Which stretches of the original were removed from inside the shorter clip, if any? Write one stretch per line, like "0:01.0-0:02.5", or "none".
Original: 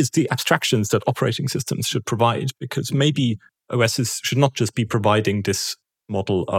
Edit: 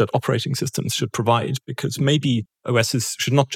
0:03.5-0:03.6